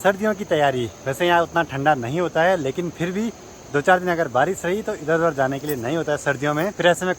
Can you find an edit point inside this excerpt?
no; 0 cuts

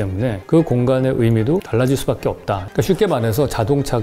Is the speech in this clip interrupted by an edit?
yes; 1 cut; at 2.7 s

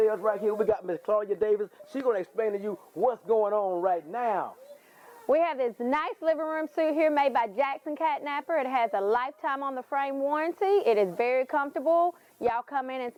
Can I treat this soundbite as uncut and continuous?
yes; 0 cuts

